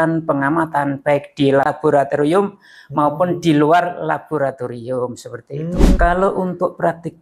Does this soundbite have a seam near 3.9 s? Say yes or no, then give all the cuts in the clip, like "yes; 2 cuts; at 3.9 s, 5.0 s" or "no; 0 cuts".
no; 2 cuts; at 1.7 s, 6.0 s